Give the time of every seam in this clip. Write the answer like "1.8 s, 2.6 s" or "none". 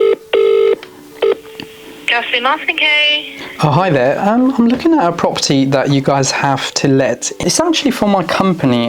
1.0 s, 7.4 s